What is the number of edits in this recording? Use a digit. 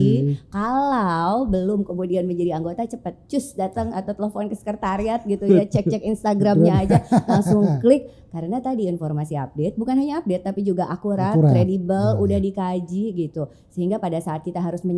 0